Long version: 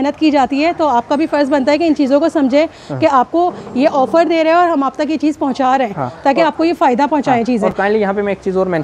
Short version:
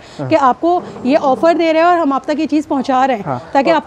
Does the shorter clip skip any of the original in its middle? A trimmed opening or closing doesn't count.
no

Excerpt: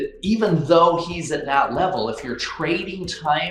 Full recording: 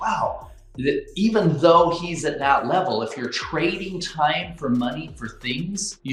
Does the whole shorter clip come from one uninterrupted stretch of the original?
yes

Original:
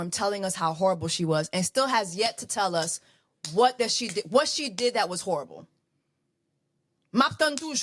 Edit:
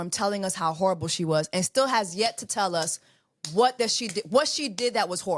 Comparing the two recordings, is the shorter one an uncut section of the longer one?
yes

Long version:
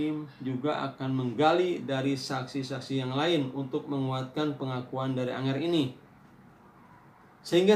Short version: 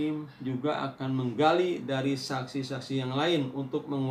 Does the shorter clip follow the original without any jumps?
yes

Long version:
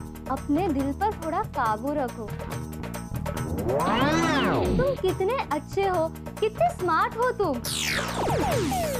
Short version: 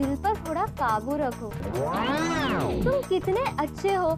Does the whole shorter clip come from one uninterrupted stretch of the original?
no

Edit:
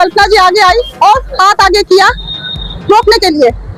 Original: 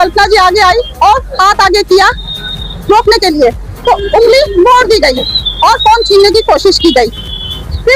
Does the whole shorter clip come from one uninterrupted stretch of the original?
yes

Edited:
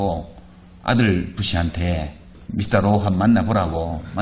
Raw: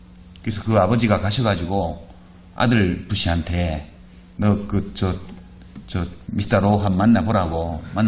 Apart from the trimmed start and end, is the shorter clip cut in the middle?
yes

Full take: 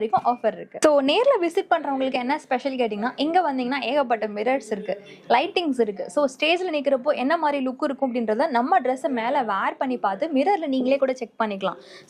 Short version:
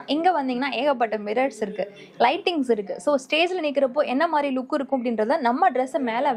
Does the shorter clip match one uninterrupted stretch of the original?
yes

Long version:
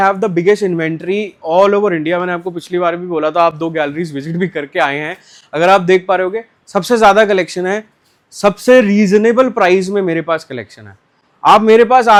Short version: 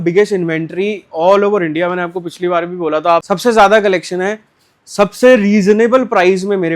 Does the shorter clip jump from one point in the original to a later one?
yes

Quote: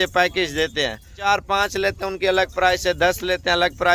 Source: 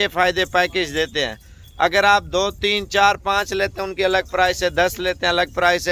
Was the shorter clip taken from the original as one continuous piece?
no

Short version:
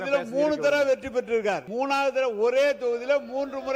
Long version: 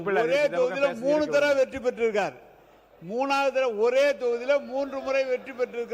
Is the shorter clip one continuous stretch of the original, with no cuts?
no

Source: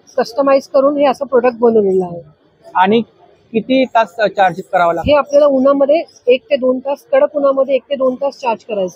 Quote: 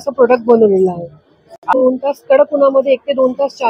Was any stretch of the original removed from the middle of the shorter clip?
yes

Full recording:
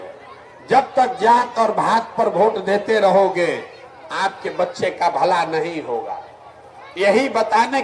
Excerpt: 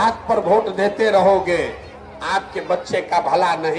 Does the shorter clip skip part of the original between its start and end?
no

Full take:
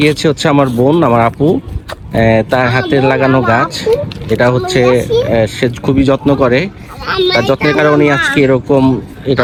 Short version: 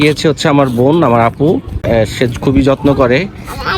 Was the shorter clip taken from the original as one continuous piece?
no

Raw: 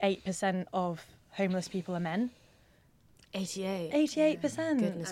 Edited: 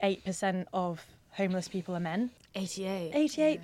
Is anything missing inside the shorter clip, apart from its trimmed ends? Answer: yes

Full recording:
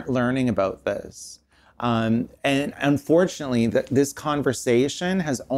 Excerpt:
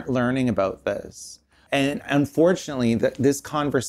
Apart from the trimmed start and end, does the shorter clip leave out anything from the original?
yes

